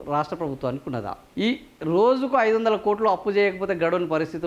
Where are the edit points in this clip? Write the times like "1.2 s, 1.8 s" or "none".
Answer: 1.4 s